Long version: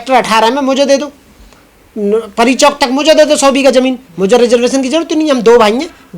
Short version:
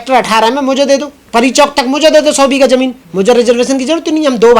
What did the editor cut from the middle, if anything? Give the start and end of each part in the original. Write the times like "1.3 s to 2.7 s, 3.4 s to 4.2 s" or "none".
1.2 s to 2.3 s